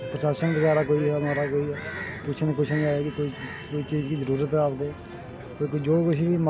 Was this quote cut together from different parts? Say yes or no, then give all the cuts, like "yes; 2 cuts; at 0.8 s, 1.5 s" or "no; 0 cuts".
no; 0 cuts